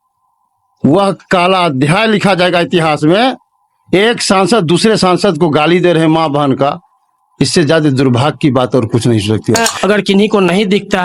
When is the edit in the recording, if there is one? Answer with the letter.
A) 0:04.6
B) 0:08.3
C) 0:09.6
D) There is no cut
C